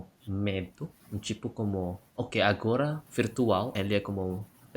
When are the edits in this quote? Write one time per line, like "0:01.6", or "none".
0:03.7